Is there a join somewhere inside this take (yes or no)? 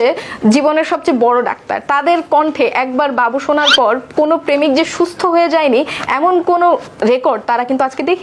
no